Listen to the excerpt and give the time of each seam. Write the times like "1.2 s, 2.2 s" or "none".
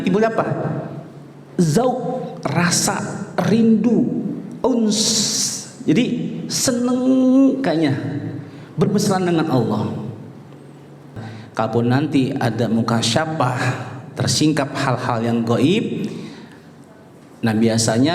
11.3 s